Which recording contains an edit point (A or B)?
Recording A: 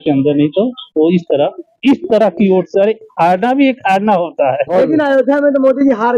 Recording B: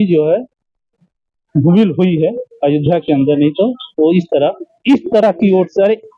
A